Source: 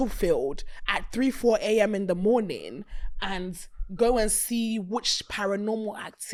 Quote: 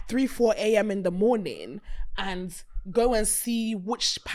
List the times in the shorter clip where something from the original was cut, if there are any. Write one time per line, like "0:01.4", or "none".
none